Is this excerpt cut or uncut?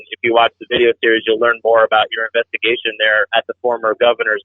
cut